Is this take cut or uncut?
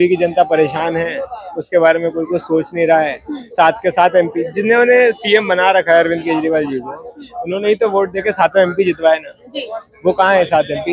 uncut